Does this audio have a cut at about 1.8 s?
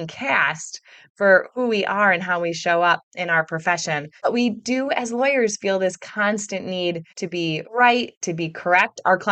no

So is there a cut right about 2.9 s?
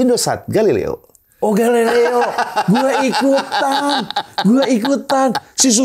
no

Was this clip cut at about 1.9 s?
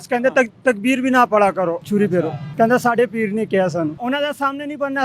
yes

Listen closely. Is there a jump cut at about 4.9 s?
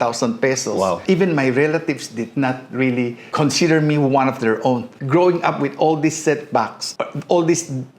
yes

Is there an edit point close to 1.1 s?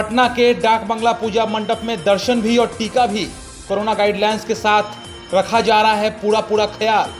no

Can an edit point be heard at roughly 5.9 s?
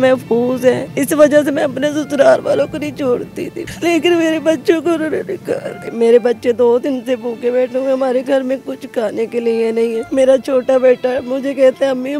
yes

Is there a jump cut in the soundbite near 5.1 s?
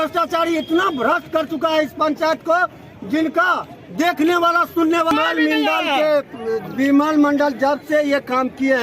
yes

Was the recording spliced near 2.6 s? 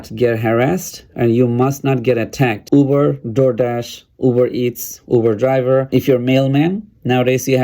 yes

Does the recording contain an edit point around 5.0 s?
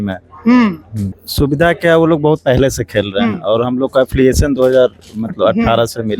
no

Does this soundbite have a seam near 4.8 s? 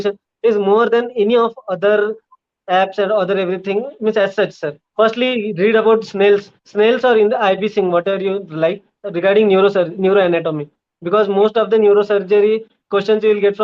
yes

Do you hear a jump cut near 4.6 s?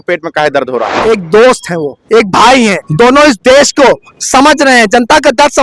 no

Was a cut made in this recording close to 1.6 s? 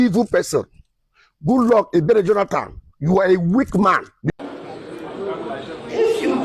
no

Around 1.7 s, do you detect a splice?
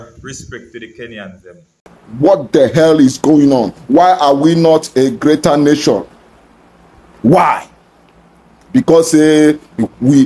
yes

